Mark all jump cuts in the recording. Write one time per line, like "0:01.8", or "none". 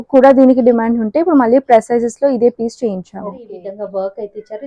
0:03.6